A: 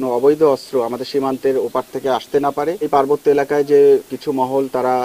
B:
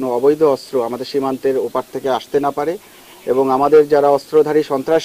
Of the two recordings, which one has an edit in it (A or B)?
A